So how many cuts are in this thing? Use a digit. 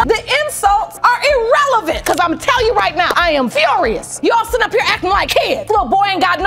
1